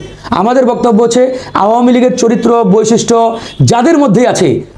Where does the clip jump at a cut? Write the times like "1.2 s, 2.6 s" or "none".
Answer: none